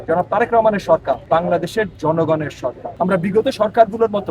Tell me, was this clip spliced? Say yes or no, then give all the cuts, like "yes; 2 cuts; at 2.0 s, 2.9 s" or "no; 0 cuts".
yes; 2 cuts; at 1.2 s, 2.8 s